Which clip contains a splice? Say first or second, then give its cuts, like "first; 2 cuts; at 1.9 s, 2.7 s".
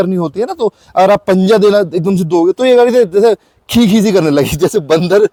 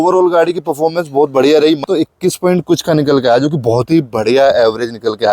second; 1 cut; at 1.8 s